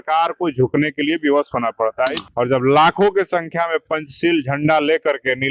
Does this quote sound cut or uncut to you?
cut